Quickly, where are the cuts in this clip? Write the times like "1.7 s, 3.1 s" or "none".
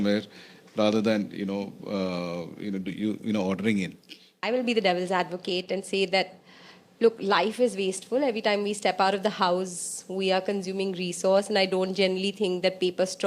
4.4 s